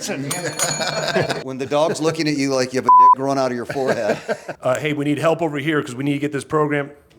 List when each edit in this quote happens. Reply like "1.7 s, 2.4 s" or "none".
1.4 s, 4.5 s

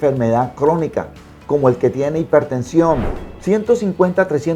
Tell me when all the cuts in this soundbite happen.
3.2 s

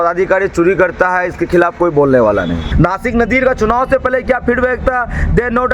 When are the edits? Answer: 2.7 s

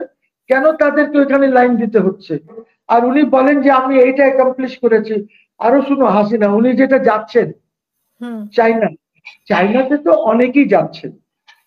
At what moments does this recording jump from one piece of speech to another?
2.7 s

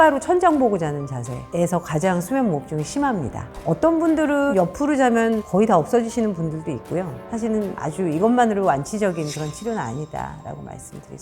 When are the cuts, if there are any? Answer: 3.4 s, 7.2 s

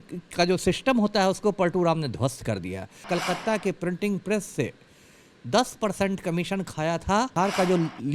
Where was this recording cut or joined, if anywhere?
3.1 s, 7.3 s

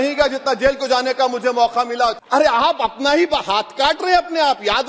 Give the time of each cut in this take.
2.2 s

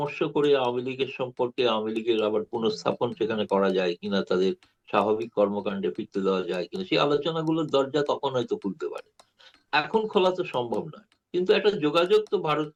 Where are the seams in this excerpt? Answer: none

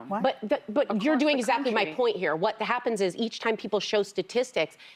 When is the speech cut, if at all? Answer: none

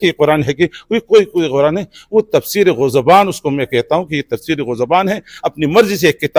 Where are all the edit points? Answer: none

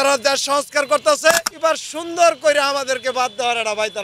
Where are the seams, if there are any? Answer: 1.5 s

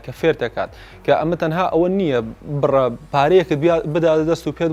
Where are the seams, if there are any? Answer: none

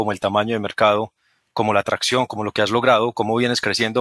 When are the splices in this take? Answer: none

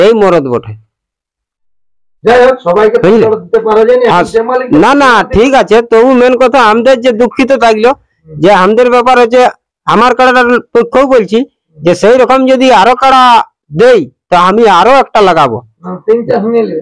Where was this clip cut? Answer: none

